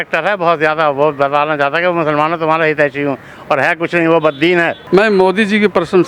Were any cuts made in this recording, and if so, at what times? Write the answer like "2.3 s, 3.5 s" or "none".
4.8 s